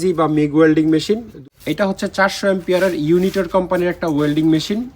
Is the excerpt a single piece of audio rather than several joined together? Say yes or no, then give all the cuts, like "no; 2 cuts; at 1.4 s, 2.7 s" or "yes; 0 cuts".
no; 1 cut; at 1.4 s